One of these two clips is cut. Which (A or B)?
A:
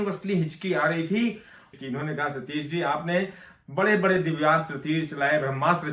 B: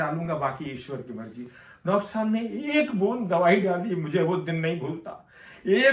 A